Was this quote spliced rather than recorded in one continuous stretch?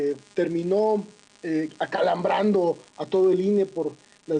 no; 0 cuts

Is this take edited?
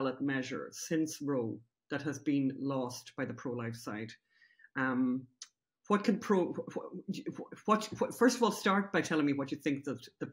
no; 0 cuts

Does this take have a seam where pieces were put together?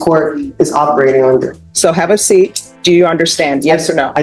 yes; 2 cuts; at 1.6 s, 2.7 s

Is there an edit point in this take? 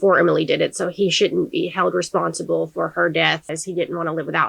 yes; 1 cut; at 3.5 s

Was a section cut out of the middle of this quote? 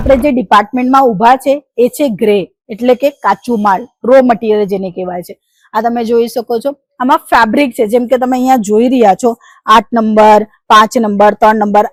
no; 0 cuts

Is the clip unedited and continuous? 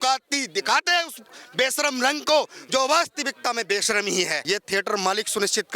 no; 1 cut; at 4.4 s

